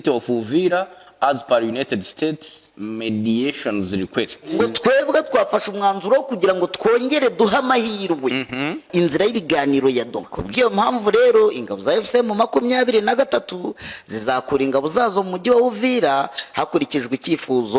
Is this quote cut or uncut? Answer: cut